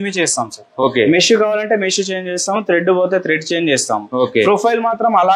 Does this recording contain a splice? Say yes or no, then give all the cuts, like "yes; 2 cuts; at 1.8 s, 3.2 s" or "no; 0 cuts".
no; 0 cuts